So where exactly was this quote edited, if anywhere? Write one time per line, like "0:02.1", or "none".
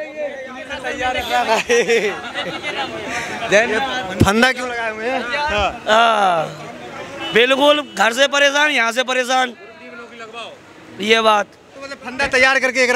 none